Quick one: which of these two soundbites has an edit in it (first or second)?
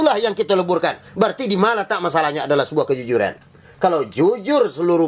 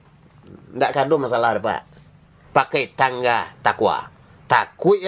second